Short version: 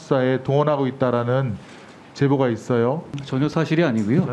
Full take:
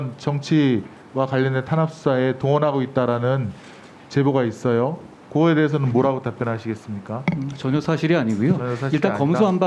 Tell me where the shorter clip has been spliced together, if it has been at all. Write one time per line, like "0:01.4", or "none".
0:03.2